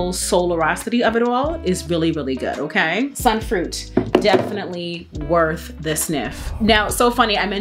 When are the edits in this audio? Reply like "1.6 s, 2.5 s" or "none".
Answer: none